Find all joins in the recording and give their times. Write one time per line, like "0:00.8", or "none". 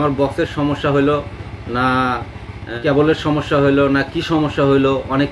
0:02.6

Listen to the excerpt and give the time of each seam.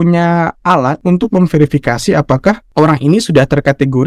0:01.0
0:02.6

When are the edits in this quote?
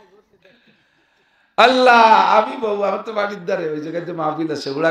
none

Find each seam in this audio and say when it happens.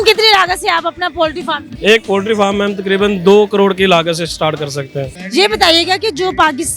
0:01.7
0:05.1

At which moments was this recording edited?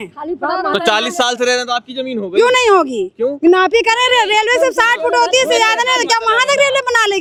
none

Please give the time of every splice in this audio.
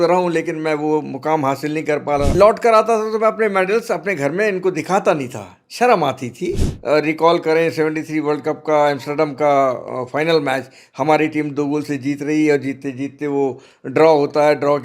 0:02.3
0:06.7

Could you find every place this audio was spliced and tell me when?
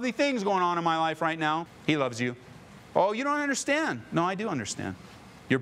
none

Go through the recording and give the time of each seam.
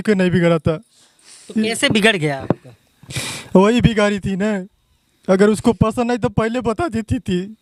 none

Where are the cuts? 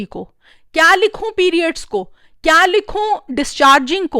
none

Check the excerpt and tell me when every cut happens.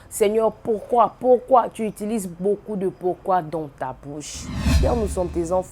0:04.8

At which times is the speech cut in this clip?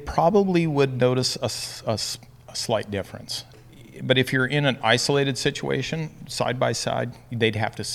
0:03.5

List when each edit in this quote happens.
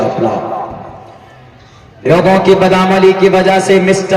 0:02.1

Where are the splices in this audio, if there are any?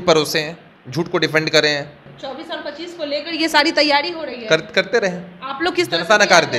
0:02.1

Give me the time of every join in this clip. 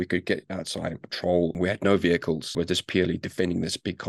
0:01.5
0:02.5

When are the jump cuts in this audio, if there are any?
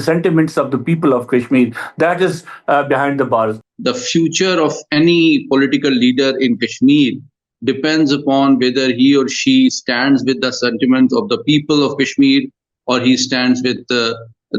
0:03.6

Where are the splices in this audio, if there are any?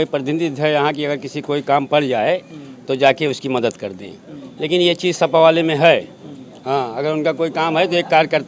none

